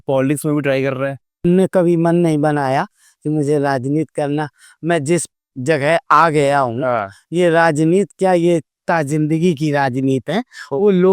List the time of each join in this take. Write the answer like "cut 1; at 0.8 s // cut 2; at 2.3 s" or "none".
cut 1; at 1.4 s